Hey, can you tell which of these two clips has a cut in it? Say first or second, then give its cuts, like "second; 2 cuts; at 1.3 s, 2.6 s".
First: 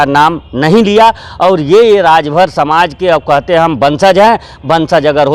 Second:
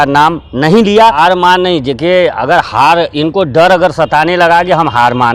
second; 1 cut; at 1.2 s